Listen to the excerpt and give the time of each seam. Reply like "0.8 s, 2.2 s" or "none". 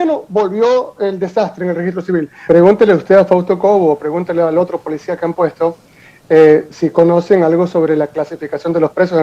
2.4 s